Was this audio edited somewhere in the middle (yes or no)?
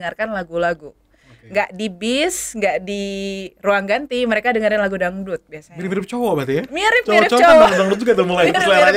no